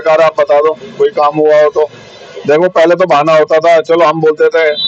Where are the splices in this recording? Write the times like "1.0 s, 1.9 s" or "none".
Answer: none